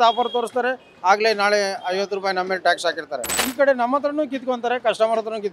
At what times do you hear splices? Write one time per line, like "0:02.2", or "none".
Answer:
0:03.4